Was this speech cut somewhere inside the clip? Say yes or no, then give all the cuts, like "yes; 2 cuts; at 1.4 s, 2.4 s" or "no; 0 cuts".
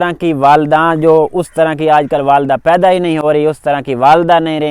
no; 0 cuts